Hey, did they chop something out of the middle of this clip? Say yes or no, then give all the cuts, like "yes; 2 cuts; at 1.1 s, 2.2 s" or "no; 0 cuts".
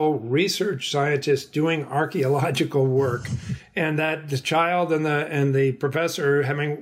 no; 0 cuts